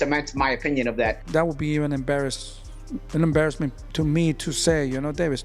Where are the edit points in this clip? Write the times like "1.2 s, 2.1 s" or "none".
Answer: 1.2 s